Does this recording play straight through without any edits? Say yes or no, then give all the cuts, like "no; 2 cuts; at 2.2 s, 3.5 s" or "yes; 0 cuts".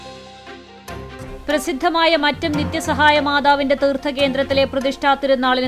no; 1 cut; at 1.3 s